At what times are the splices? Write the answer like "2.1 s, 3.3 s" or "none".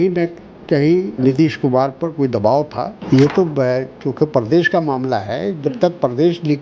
1.2 s, 3.0 s